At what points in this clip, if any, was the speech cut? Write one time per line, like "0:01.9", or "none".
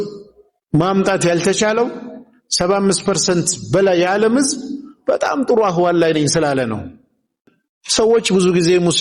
0:07.4